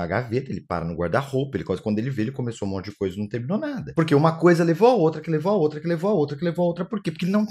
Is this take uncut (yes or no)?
yes